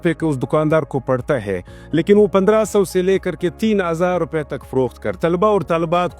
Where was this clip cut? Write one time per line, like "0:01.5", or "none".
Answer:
0:05.1